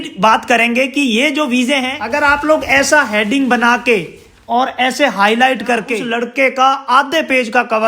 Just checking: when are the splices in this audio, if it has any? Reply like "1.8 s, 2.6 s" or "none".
2.0 s, 6.0 s